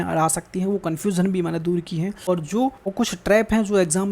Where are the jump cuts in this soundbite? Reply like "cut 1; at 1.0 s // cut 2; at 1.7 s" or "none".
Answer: cut 1; at 2.2 s // cut 2; at 2.8 s